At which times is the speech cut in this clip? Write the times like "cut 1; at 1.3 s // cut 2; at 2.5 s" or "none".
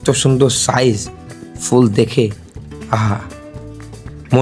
none

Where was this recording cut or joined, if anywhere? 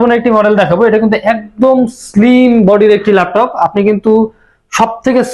none

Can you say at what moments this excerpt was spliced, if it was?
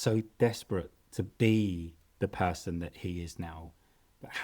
cut 1; at 1.0 s

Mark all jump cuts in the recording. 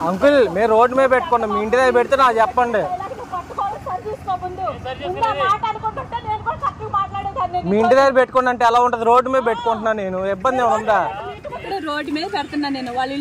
cut 1; at 3.7 s // cut 2; at 11.7 s

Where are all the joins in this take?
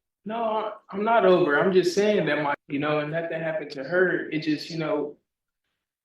cut 1; at 2.6 s

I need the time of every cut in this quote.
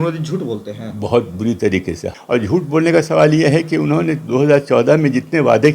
cut 1; at 2.0 s

